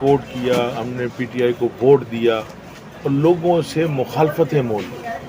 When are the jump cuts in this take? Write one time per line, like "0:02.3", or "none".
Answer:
none